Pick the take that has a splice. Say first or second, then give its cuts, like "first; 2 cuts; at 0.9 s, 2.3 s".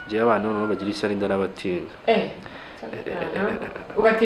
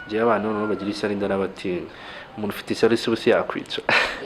second; 1 cut; at 1.9 s